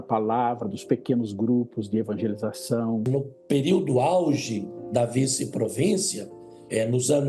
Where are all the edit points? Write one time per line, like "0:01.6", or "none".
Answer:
0:03.0